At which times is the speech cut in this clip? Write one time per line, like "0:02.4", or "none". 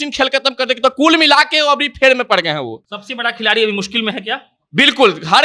none